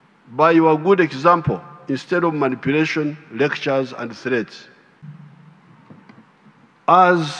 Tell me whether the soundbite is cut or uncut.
cut